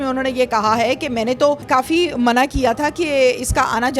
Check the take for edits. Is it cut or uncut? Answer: cut